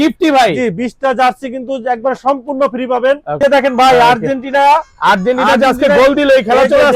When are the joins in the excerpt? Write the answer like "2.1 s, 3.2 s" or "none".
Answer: 3.4 s